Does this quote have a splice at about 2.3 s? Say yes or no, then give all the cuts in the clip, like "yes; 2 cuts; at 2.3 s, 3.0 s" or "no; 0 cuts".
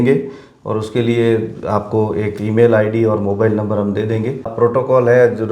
no; 1 cut; at 4.5 s